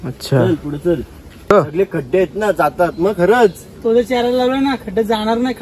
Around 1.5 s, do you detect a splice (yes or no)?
yes